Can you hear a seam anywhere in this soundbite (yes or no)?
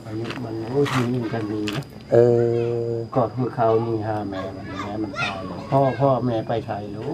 no